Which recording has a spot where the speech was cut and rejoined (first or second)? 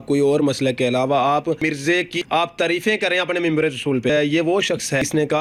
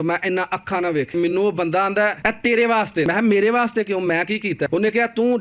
second